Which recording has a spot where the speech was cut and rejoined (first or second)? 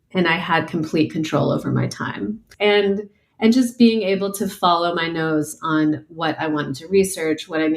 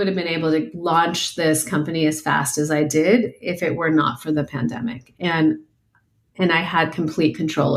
first